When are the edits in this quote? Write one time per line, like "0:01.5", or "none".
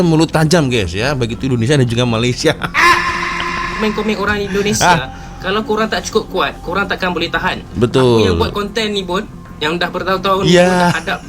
none